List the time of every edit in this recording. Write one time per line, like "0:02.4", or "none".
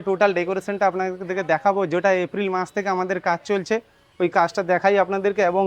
none